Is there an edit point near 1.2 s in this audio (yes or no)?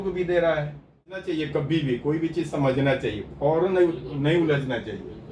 yes